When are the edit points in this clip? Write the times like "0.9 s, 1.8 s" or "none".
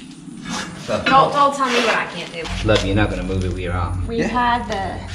2.4 s, 4.0 s